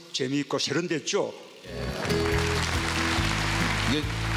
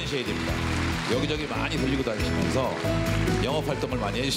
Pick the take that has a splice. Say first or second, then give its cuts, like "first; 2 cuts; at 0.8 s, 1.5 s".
second; 1 cut; at 2.0 s